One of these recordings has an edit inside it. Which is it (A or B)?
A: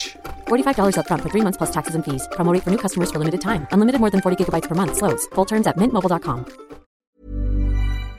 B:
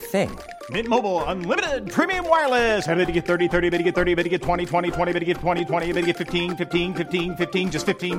A